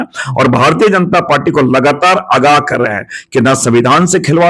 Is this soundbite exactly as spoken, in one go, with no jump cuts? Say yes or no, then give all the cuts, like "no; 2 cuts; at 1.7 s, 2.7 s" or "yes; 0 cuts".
yes; 0 cuts